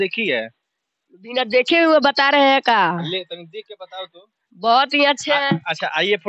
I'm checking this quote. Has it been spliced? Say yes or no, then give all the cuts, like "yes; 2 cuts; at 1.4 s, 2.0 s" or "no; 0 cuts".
no; 0 cuts